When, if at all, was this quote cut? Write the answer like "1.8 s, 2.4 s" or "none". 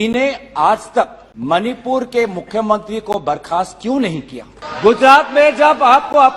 1.3 s, 4.6 s